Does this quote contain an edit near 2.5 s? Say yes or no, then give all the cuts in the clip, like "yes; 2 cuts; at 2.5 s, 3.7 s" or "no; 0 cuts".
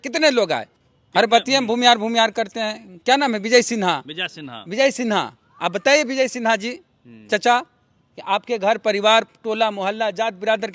no; 0 cuts